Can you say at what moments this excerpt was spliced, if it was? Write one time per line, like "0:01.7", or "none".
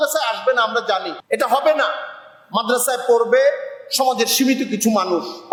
none